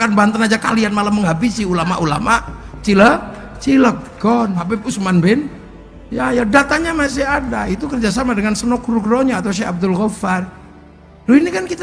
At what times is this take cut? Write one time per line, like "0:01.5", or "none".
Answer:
0:04.8